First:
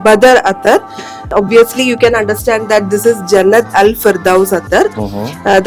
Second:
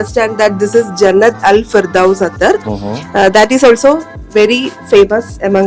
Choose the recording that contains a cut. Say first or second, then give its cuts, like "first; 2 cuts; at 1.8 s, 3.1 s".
first; 1 cut; at 1.3 s